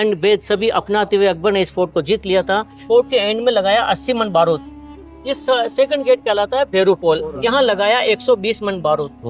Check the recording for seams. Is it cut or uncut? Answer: cut